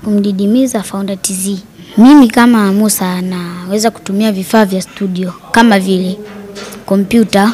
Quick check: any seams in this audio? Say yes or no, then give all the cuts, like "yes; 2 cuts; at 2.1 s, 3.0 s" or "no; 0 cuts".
yes; 1 cut; at 1.7 s